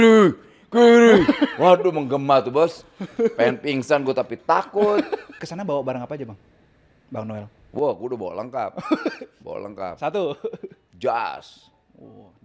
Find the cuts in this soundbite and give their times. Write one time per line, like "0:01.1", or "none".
0:05.4